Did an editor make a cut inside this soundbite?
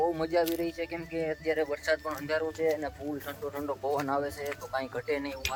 no; 0 cuts

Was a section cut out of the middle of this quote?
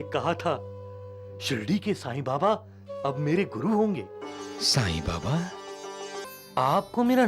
yes; 1 cut; at 6.2 s

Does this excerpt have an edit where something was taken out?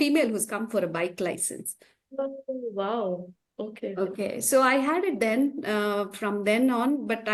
no; 0 cuts

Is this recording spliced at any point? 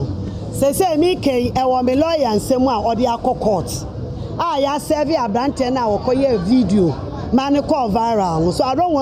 no; 0 cuts

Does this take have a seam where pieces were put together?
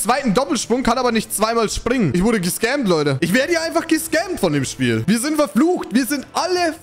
yes; 2 cuts; at 2.1 s, 3.2 s

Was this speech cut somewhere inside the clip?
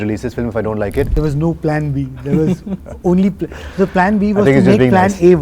yes; 1 cut; at 1.1 s

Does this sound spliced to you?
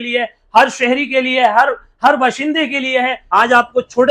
yes; 1 cut; at 3.2 s

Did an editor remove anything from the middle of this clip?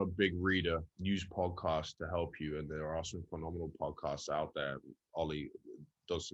yes; 1 cut; at 0.9 s

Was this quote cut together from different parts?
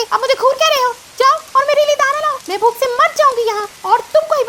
no; 0 cuts

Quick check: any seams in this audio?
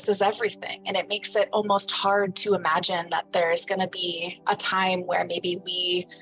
no; 0 cuts

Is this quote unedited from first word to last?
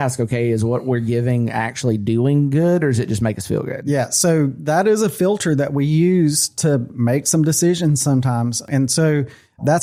yes; 0 cuts

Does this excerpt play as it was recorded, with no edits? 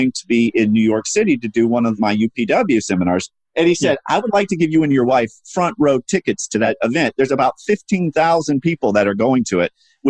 no; 1 cut; at 3.4 s

